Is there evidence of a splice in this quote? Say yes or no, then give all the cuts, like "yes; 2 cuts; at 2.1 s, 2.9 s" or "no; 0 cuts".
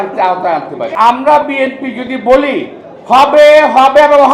yes; 1 cut; at 0.9 s